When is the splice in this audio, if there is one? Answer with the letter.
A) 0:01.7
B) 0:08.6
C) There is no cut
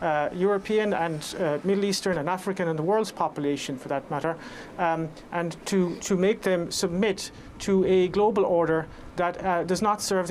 C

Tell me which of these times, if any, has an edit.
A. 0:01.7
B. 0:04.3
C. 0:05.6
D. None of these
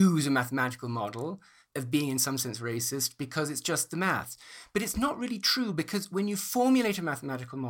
D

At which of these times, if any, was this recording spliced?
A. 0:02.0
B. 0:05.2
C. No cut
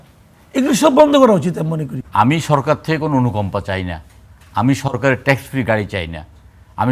A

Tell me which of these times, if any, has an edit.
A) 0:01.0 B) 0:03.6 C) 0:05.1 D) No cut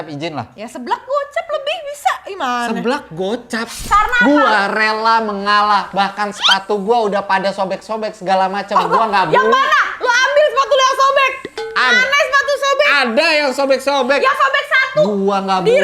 B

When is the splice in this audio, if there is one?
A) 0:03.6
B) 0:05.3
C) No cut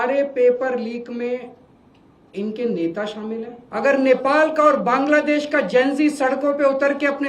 A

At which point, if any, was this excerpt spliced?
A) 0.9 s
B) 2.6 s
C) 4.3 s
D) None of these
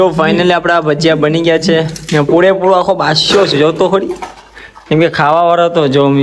D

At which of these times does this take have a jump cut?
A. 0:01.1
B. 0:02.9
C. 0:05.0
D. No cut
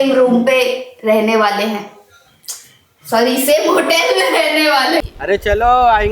C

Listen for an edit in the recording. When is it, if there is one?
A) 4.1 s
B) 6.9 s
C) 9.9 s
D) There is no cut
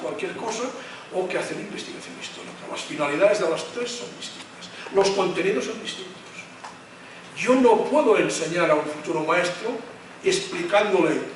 A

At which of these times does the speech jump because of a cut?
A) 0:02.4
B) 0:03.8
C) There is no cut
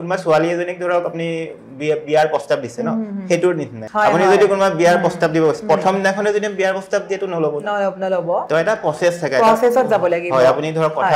B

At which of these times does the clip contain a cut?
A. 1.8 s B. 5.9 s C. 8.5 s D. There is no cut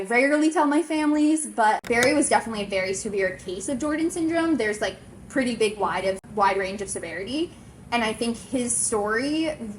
A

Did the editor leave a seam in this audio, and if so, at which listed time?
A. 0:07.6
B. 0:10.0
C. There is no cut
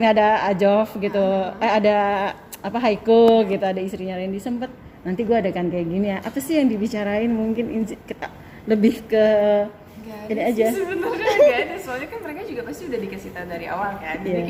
C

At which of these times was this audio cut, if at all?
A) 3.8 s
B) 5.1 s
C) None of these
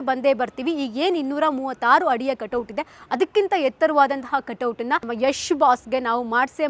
B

